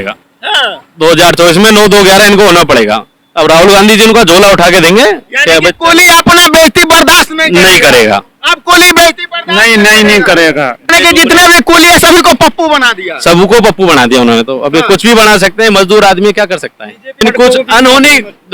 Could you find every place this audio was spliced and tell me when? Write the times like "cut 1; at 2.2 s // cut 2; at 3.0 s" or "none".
cut 1; at 10.9 s // cut 2; at 17.2 s